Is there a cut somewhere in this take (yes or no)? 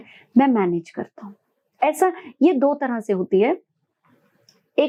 no